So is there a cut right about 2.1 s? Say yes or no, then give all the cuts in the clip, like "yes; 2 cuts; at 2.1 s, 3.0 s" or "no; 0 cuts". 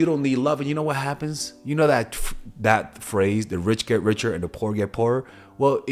no; 0 cuts